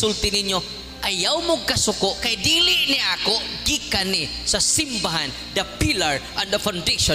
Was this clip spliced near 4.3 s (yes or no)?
no